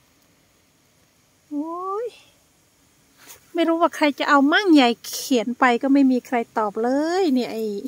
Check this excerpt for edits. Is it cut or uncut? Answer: uncut